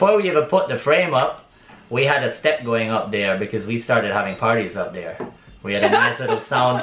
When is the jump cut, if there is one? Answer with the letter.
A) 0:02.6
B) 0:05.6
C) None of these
C